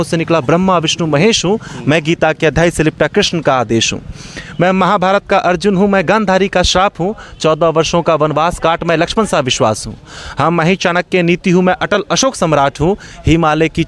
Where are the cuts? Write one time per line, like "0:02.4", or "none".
none